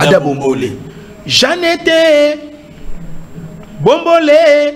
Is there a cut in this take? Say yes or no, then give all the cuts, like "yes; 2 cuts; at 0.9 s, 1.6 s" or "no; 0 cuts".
no; 0 cuts